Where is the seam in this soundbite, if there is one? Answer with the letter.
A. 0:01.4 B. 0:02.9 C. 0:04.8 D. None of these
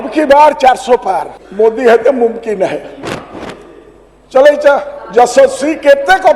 A